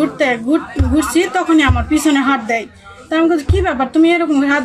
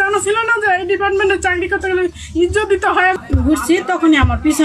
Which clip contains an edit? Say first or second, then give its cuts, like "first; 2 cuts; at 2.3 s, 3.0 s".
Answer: second; 1 cut; at 3.2 s